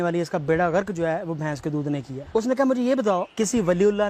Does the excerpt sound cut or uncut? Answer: cut